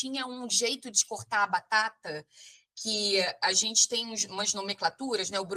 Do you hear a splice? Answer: no; 0 cuts

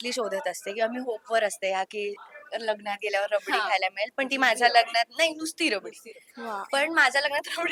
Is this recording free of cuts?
yes; 0 cuts

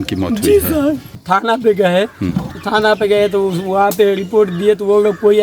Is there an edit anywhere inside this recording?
yes; 1 cut; at 1.1 s

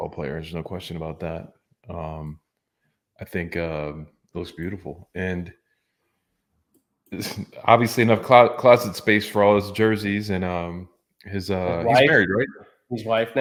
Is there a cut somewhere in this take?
no; 0 cuts

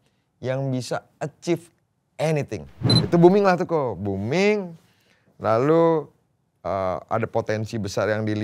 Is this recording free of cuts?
no; 1 cut; at 2.9 s

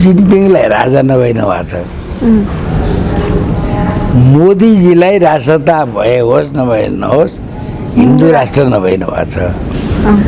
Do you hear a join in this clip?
no; 0 cuts

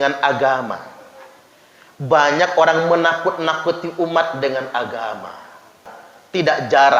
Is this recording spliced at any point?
yes; 1 cut; at 5.9 s

